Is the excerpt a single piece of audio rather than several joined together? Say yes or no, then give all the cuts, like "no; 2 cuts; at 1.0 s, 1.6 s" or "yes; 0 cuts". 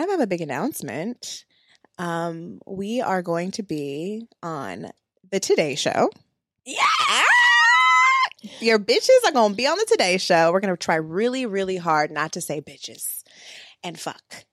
yes; 0 cuts